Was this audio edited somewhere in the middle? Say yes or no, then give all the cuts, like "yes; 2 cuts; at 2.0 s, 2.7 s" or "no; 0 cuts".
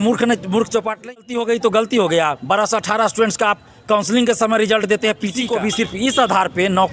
yes; 2 cuts; at 1.1 s, 5.4 s